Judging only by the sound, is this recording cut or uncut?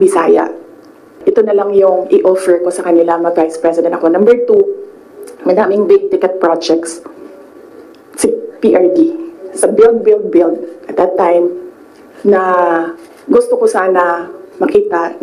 cut